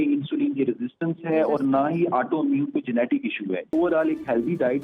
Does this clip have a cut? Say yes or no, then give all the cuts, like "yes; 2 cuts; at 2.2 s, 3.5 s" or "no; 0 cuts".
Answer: yes; 1 cut; at 3.7 s